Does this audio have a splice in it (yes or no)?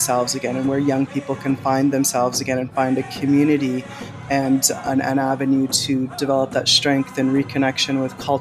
no